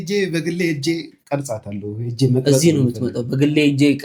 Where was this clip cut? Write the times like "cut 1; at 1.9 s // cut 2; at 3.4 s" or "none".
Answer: none